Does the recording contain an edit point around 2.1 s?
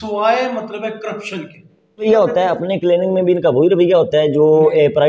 yes; 1 cut; at 2.1 s

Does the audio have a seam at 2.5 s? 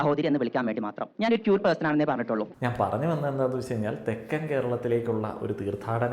yes; 1 cut; at 2.5 s

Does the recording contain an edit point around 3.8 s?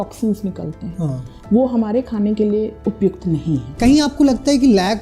yes; 2 cuts; at 2.8 s, 3.8 s

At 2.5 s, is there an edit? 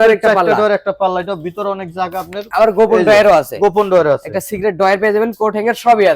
yes; 1 cut; at 2.5 s

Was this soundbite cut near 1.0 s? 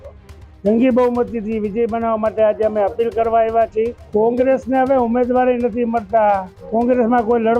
no; 2 cuts; at 4.0 s, 6.5 s

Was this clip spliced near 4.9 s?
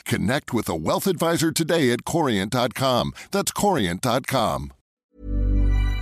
yes; 1 cut; at 4.9 s

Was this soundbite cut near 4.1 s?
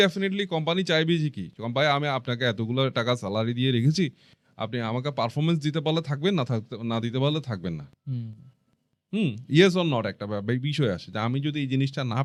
no; 0 cuts

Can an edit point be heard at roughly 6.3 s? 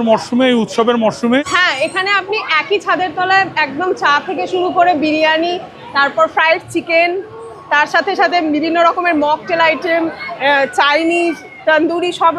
no; 1 cut; at 1.5 s

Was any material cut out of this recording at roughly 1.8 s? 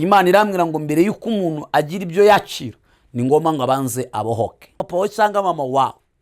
no; 1 cut; at 4.8 s

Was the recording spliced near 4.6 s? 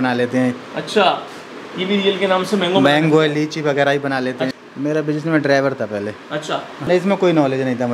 yes; 2 cuts; at 4.6 s, 6.9 s

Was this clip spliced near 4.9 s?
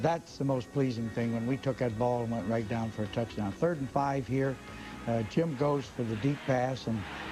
no; 1 cut; at 3.1 s

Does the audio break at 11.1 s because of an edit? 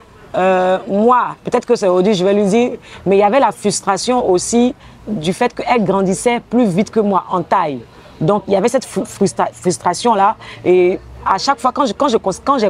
no; 0 cuts

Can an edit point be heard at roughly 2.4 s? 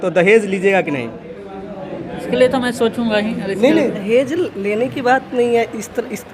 no; 1 cut; at 4.0 s

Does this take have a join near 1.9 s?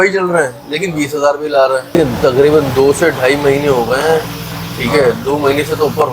yes; 1 cut; at 1.9 s

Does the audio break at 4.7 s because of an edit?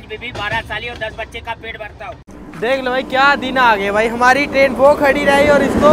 no; 1 cut; at 2.3 s

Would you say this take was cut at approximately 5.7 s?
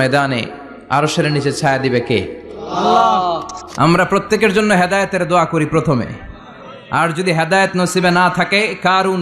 no; 1 cut; at 3.7 s

